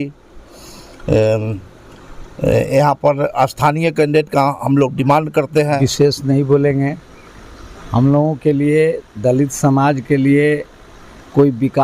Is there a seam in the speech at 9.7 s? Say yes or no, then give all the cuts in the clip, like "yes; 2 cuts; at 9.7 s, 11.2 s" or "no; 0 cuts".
no; 1 cut; at 5.8 s